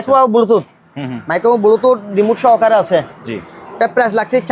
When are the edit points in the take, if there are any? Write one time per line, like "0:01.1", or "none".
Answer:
none